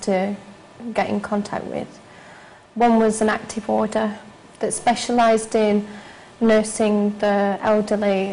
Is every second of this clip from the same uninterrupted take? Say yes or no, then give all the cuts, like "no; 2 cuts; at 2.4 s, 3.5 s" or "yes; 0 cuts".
no; 1 cut; at 3.9 s